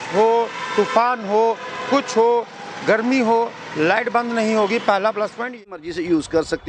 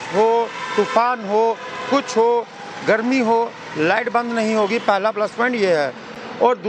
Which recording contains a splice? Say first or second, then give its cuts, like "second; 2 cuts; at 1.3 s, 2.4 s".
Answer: first; 1 cut; at 5.5 s